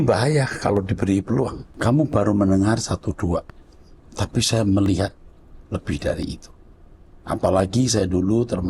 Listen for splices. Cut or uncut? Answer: cut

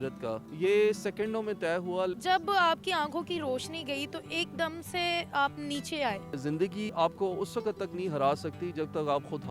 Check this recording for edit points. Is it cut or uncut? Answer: cut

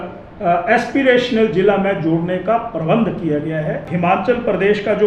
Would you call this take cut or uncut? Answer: cut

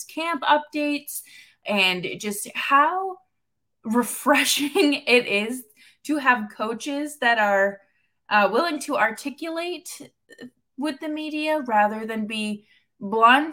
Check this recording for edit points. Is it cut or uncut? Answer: uncut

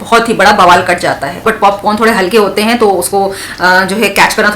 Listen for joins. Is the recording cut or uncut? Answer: cut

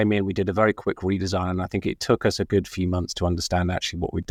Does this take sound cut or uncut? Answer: uncut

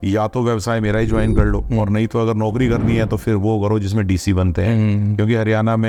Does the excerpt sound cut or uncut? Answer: uncut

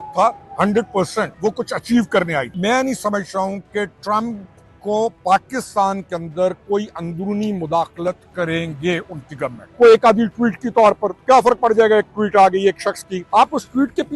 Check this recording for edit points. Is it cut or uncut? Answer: cut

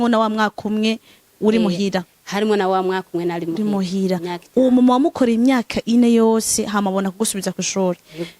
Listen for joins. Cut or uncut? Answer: uncut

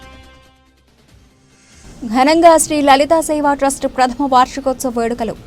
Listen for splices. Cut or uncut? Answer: cut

